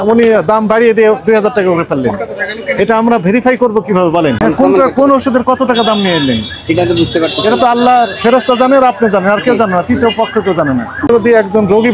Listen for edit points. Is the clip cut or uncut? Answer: cut